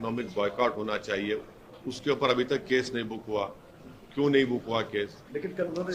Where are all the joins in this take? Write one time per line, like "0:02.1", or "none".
none